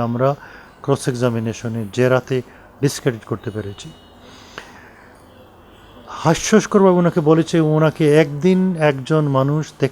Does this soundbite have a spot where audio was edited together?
no; 0 cuts

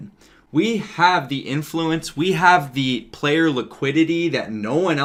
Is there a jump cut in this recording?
no; 0 cuts

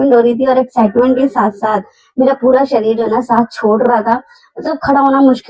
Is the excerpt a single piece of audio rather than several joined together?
yes; 0 cuts

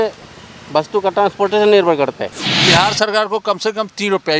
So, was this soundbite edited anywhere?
yes; 1 cut; at 2.5 s

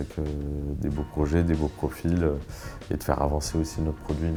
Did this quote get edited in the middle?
no; 0 cuts

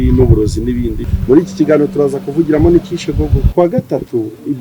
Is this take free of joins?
no; 2 cuts; at 1.1 s, 3.4 s

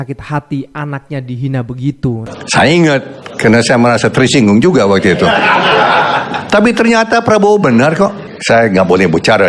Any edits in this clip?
yes; 2 cuts; at 2.3 s, 8.3 s

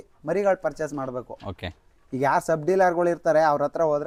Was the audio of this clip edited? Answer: no; 0 cuts

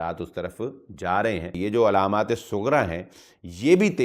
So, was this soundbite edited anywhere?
yes; 1 cut; at 1.6 s

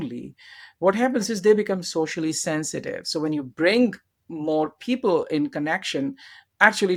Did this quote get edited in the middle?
no; 0 cuts

